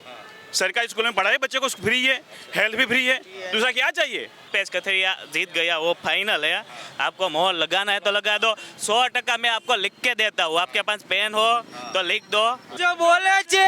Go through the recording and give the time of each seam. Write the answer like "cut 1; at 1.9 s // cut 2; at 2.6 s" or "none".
cut 1; at 4.5 s // cut 2; at 12.7 s